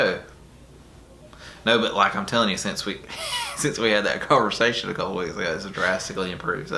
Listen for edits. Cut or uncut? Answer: uncut